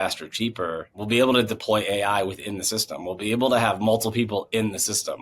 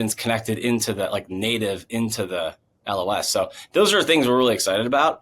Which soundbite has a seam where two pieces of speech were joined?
first; 1 cut; at 1.0 s

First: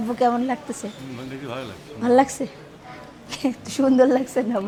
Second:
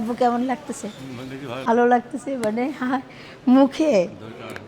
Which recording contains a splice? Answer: second; 1 cut; at 1.7 s

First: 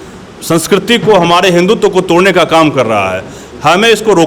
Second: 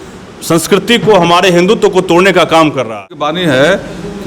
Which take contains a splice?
second; 1 cut; at 3.3 s

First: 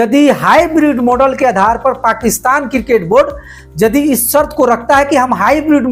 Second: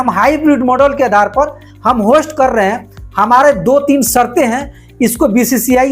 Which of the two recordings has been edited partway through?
second; 1 cut; at 1.7 s

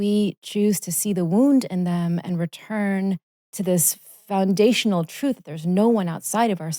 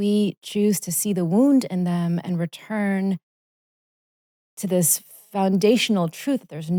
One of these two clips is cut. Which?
first; 1 cut; at 3.4 s

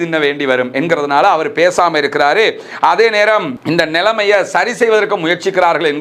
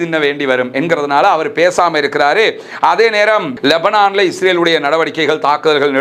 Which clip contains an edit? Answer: second; 1 cut; at 3.5 s

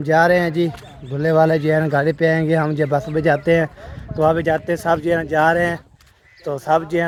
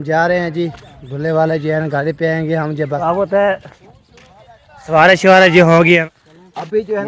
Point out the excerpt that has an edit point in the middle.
second; 2 cuts; at 3.0 s, 6.0 s

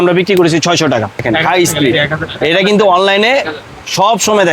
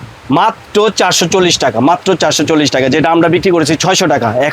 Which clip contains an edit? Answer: first; 1 cut; at 1.2 s

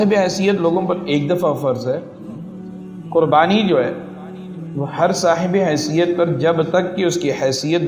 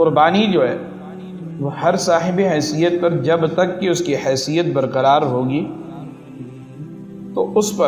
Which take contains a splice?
second; 2 cuts; at 5.8 s, 7.1 s

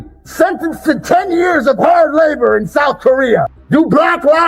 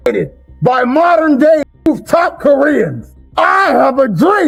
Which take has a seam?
first; 1 cut; at 3.6 s

